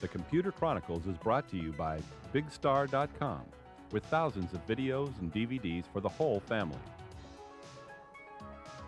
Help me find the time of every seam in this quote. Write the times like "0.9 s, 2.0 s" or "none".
6.8 s